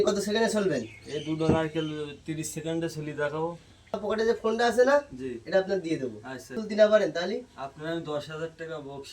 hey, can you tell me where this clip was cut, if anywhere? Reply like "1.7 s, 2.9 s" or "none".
4.0 s, 6.6 s